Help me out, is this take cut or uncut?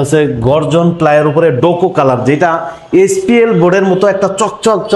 uncut